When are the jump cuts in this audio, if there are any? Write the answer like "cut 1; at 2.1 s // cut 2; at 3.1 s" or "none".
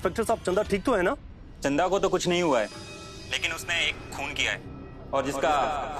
none